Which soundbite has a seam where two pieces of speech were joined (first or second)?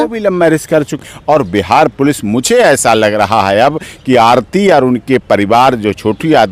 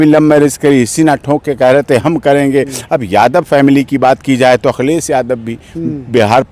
first